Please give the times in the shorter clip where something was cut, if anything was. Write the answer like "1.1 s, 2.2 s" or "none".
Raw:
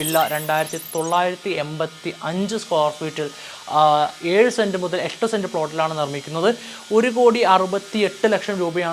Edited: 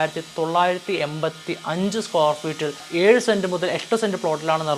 2.9 s